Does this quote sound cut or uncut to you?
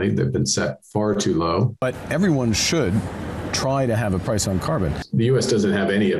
cut